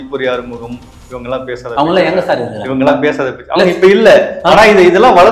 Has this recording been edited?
no; 0 cuts

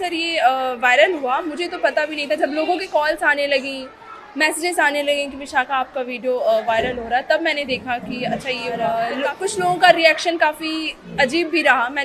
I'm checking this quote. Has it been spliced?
yes; 1 cut; at 8.9 s

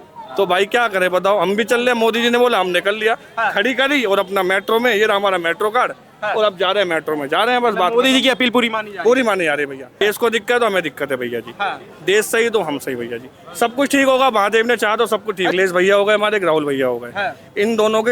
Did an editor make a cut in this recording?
yes; 2 cuts; at 10.0 s, 15.5 s

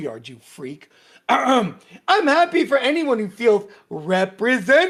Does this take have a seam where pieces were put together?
no; 0 cuts

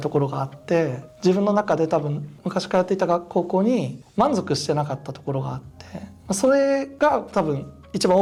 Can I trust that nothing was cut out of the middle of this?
yes; 0 cuts

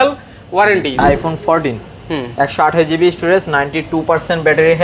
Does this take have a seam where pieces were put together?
yes; 1 cut; at 1.0 s

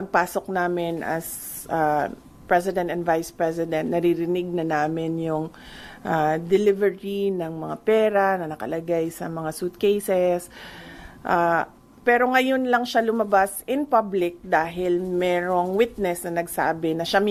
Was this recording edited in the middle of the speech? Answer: no; 0 cuts

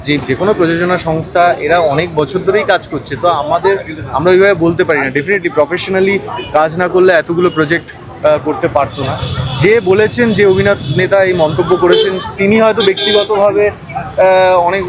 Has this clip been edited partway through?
no; 0 cuts

